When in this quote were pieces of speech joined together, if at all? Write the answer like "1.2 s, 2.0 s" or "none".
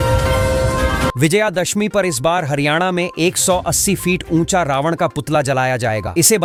none